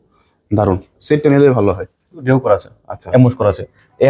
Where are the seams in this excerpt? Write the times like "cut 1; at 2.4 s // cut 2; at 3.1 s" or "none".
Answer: cut 1; at 2.1 s